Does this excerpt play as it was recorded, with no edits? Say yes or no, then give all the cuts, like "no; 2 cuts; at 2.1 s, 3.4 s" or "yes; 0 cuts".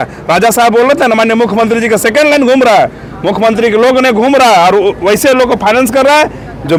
yes; 0 cuts